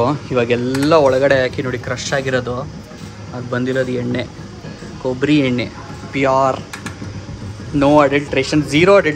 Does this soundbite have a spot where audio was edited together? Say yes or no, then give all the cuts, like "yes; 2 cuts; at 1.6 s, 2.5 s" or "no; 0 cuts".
no; 0 cuts